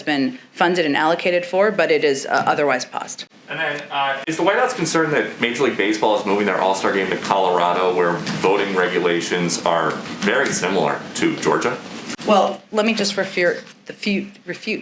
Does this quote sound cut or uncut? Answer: uncut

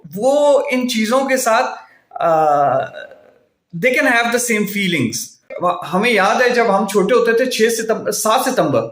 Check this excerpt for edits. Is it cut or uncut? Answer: cut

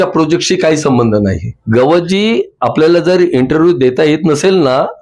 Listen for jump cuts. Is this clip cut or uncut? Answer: cut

